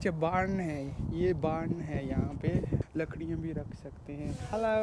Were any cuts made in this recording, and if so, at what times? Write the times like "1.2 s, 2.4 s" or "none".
2.8 s